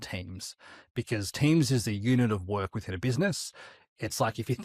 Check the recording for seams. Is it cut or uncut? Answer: uncut